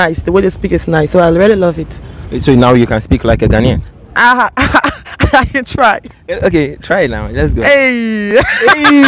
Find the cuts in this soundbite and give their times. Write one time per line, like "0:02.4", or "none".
none